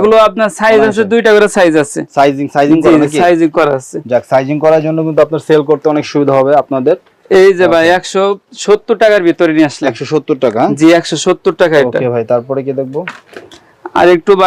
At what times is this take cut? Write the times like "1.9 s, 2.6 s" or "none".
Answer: none